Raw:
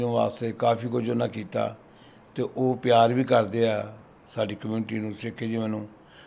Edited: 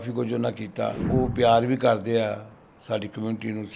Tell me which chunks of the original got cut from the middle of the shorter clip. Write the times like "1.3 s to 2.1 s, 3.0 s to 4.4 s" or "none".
1.8 s to 2.5 s